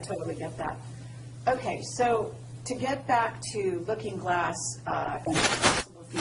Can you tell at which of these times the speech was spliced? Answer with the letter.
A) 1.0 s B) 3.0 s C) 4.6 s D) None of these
C